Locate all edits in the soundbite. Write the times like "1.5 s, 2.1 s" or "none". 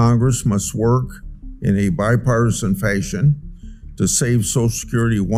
none